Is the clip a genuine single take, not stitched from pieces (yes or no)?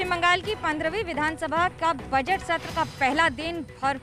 yes